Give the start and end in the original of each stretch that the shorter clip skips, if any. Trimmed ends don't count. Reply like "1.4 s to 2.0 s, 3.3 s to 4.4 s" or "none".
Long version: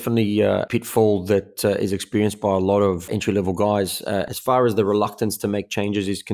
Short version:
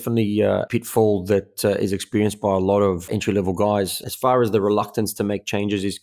4.0 s to 4.3 s